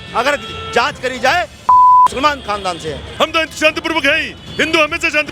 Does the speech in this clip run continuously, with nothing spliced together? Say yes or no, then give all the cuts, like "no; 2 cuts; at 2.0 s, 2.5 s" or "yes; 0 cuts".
no; 1 cut; at 3.0 s